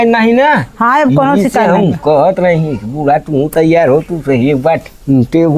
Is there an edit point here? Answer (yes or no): no